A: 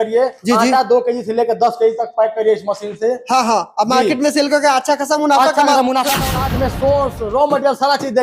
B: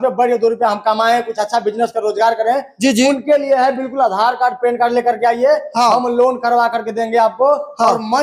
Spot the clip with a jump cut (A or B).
A